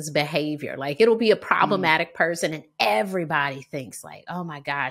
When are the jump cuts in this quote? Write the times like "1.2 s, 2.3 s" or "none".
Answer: none